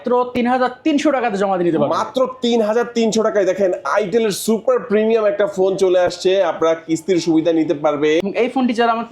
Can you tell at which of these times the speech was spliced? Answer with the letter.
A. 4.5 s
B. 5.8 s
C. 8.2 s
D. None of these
C